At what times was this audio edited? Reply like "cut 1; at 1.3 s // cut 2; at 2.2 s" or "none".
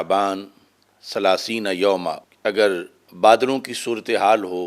cut 1; at 2.3 s // cut 2; at 3.0 s